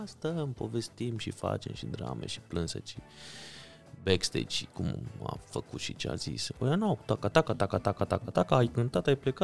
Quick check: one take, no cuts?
yes; 0 cuts

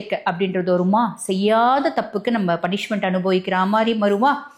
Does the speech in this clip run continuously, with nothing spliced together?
yes; 0 cuts

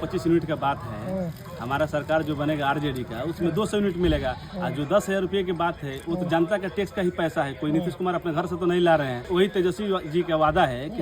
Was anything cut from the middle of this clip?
yes; 1 cut; at 9.2 s

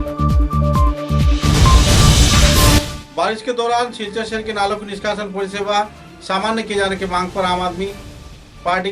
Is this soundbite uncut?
no; 1 cut; at 3.0 s

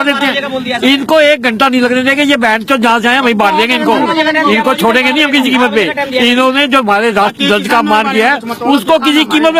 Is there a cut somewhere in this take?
no; 0 cuts

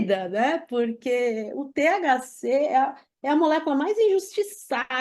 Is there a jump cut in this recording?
no; 0 cuts

